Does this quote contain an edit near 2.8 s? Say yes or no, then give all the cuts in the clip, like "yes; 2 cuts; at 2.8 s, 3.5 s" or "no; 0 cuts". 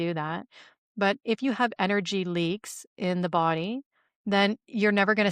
no; 0 cuts